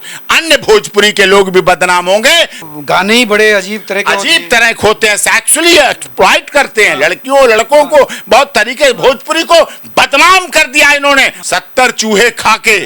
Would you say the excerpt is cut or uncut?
cut